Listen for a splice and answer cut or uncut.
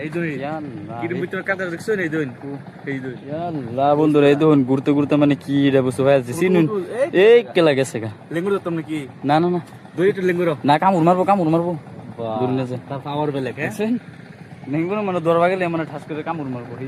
uncut